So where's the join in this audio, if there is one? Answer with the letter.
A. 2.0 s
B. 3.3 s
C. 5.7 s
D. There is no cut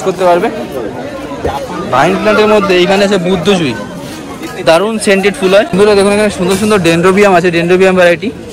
C